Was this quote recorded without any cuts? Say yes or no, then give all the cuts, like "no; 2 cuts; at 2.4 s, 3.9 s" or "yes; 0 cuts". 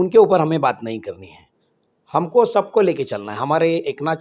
yes; 0 cuts